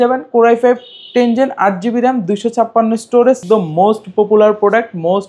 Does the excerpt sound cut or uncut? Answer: cut